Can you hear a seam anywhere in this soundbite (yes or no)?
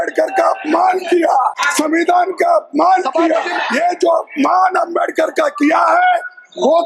yes